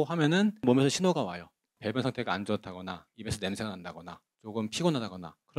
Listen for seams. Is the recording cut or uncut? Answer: uncut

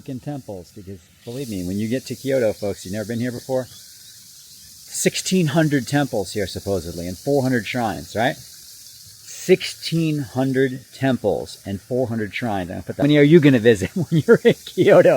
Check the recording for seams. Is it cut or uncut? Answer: cut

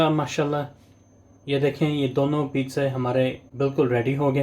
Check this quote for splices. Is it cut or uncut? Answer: cut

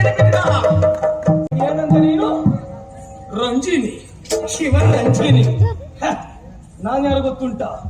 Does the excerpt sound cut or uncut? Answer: cut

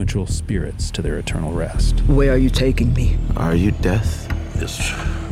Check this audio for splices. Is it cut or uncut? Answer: uncut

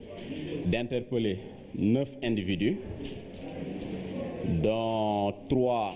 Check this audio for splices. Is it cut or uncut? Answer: uncut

